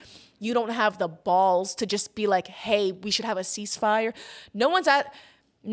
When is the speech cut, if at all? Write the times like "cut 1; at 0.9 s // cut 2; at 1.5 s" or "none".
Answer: none